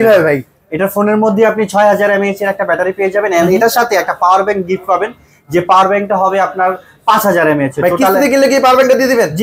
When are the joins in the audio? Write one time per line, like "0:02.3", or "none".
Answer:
none